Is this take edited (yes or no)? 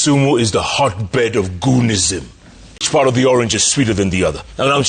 yes